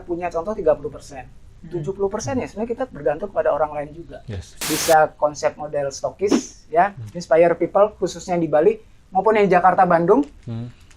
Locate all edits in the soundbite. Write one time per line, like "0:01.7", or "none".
0:04.6